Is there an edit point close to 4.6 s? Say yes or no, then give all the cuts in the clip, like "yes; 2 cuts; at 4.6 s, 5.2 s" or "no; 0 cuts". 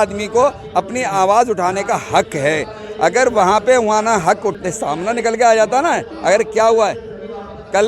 yes; 1 cut; at 4.6 s